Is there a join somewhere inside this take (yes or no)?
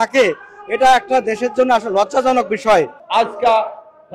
yes